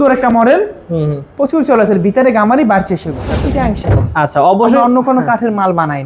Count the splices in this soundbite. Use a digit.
1